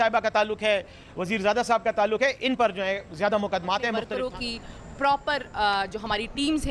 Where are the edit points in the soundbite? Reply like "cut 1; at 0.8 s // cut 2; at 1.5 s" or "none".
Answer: cut 1; at 4.1 s